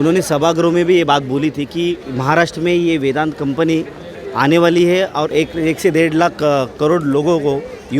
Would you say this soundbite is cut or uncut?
cut